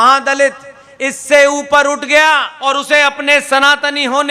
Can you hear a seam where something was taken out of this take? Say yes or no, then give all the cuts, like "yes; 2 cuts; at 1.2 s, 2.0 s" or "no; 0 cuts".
yes; 1 cut; at 2.6 s